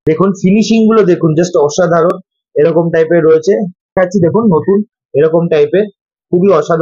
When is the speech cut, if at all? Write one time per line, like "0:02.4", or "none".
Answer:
0:03.9